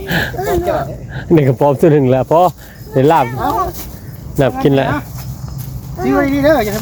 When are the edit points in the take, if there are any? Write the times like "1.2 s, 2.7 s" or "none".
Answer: none